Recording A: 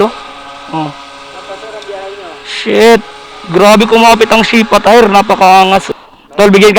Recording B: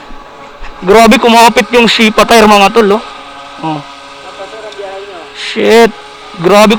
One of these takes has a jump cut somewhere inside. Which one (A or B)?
A